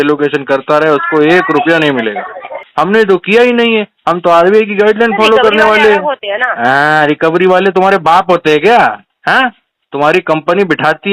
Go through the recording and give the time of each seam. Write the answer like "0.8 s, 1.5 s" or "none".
2.6 s